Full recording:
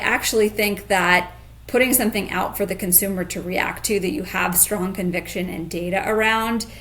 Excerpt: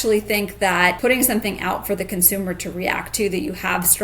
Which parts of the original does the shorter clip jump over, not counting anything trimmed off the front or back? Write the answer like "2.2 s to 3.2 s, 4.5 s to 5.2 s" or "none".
1.3 s to 1.7 s

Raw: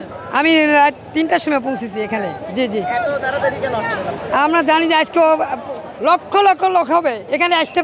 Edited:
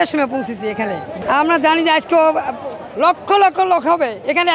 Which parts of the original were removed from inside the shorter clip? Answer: 2.5 s to 4.2 s

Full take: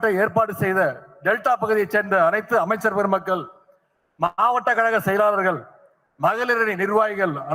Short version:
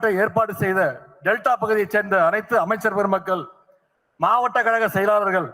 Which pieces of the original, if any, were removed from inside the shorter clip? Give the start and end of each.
4.3 s to 4.4 s

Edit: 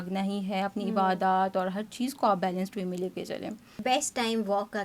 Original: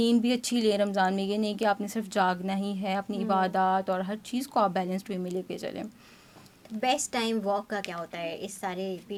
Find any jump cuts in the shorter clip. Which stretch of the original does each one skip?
6.0 s to 6.6 s

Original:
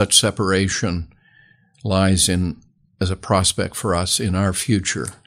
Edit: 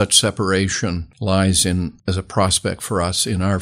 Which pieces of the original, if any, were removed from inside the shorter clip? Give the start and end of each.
1.1 s to 1.7 s, 2.6 s to 2.9 s

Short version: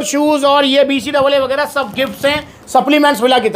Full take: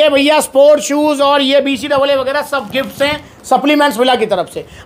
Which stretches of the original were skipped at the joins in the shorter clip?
none

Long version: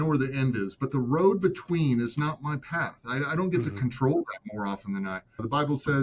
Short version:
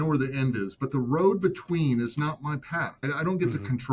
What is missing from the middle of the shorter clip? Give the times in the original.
2.9 s to 3.1 s

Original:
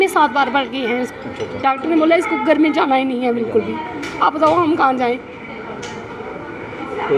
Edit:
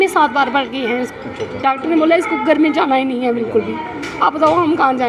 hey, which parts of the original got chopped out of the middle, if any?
none

